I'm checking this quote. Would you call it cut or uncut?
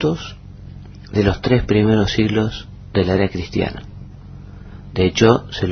uncut